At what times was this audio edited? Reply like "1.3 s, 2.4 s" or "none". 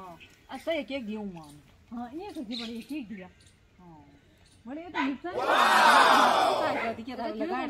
5.5 s, 6.8 s